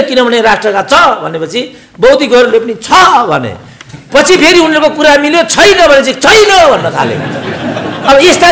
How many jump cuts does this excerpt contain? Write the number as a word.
zero